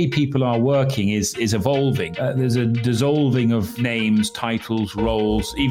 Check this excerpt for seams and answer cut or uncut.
cut